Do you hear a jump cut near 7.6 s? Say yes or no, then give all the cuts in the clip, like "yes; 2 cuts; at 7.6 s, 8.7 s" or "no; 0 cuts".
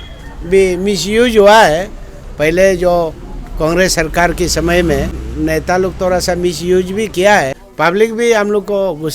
yes; 2 cuts; at 5.2 s, 7.6 s